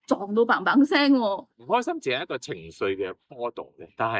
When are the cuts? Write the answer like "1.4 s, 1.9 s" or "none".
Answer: 1.4 s